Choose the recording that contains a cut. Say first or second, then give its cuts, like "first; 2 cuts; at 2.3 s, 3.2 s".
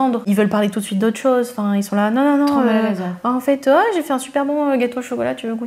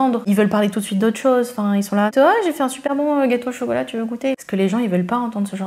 second; 2 cuts; at 2.1 s, 4.4 s